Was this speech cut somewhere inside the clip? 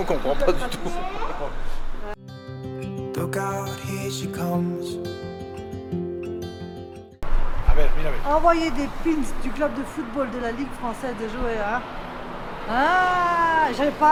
no; 0 cuts

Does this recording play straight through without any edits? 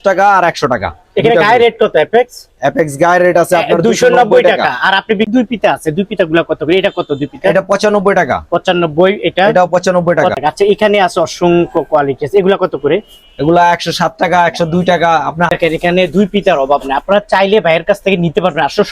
no; 3 cuts; at 5.3 s, 10.3 s, 15.5 s

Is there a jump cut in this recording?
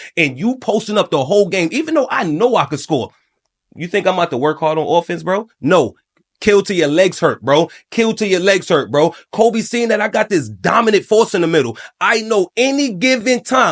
no; 0 cuts

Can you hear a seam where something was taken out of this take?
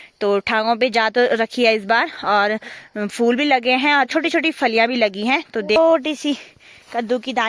yes; 1 cut; at 5.8 s

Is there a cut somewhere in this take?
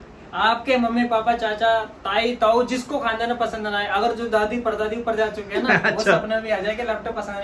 no; 0 cuts

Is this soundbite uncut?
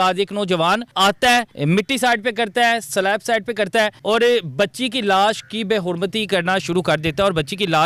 no; 3 cuts; at 0.9 s, 1.5 s, 4.0 s

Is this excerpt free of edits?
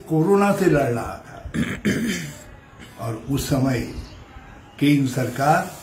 yes; 0 cuts

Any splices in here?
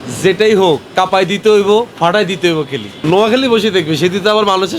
yes; 1 cut; at 2.8 s

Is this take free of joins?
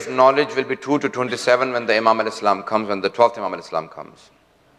no; 1 cut; at 2.3 s

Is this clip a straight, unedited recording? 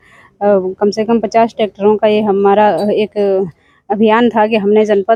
yes; 0 cuts

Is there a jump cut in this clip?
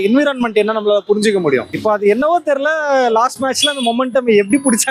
yes; 1 cut; at 1.7 s

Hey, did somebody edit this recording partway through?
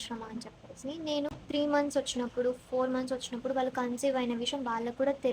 yes; 1 cut; at 1.4 s

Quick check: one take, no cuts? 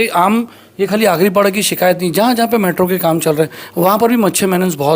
yes; 0 cuts

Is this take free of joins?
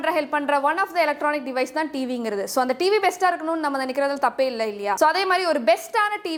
yes; 0 cuts

